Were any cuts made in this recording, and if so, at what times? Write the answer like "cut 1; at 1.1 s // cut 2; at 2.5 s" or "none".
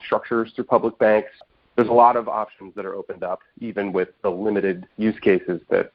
cut 1; at 1.4 s // cut 2; at 4.9 s